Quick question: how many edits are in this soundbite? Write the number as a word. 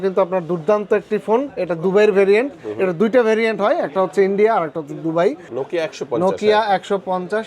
one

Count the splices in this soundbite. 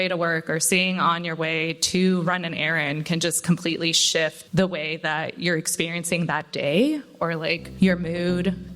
one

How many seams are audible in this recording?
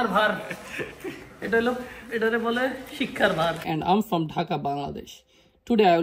one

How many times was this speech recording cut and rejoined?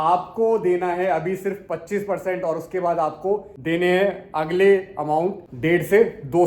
one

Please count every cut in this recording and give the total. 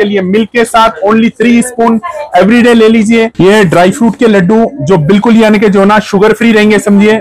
one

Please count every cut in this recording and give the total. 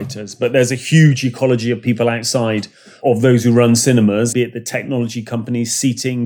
one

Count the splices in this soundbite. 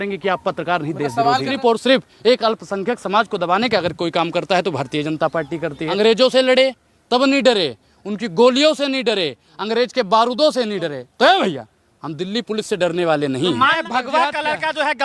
three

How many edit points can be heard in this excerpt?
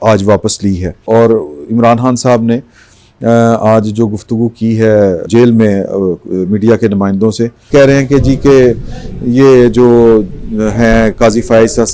three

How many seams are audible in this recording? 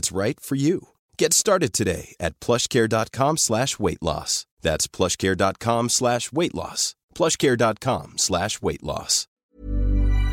one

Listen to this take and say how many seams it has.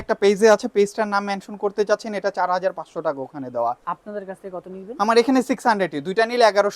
one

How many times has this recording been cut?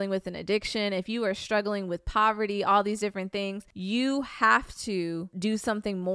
two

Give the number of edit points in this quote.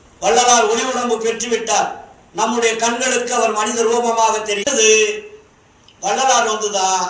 one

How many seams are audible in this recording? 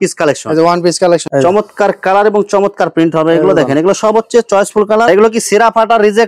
two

